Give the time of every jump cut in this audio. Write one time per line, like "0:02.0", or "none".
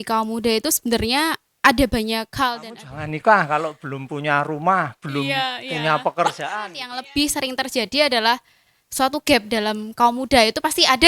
0:02.9
0:06.9